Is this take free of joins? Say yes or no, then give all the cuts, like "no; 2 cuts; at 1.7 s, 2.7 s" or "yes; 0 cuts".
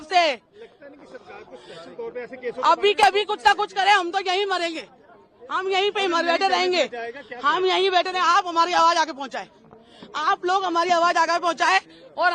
yes; 0 cuts